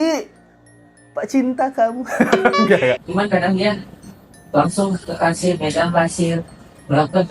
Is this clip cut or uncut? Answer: cut